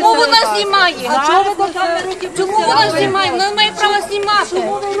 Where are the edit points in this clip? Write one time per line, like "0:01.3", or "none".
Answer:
0:01.0